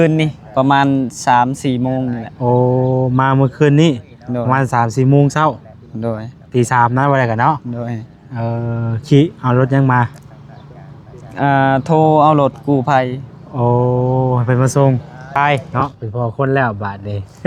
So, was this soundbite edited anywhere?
yes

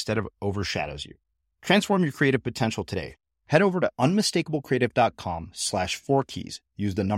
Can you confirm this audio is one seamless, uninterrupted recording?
yes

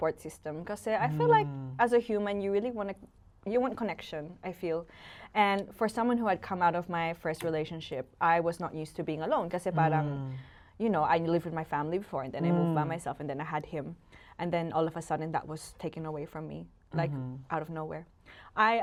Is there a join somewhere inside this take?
no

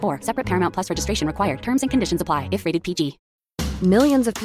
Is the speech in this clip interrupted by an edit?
no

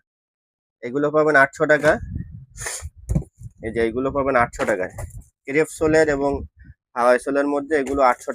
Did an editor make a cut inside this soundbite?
no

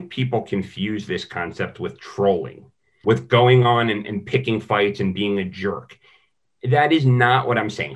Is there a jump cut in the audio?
yes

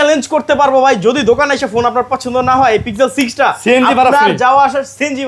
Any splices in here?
no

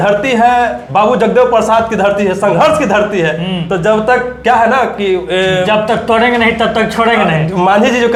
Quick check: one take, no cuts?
yes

